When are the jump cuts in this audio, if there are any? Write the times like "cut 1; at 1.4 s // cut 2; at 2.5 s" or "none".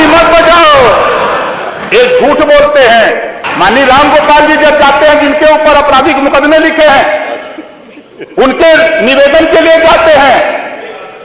cut 1; at 3.4 s